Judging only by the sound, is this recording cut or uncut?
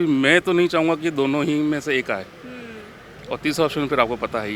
uncut